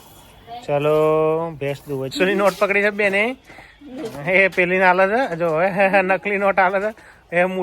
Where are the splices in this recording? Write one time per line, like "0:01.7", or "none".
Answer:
0:02.1